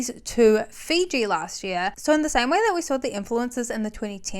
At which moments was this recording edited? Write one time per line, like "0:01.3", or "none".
0:02.0